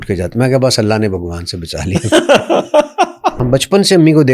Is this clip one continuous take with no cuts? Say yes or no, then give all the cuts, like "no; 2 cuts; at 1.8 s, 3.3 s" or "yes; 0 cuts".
no; 1 cut; at 3.4 s